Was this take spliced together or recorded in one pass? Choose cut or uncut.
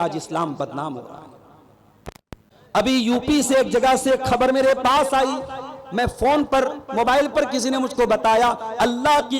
cut